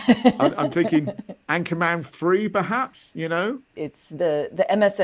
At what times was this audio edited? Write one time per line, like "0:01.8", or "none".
0:03.7